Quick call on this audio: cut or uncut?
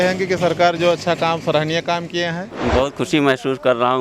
cut